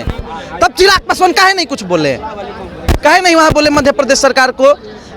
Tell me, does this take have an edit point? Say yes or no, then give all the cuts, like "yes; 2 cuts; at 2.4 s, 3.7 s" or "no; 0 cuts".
no; 0 cuts